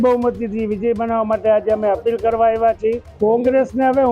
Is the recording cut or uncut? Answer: cut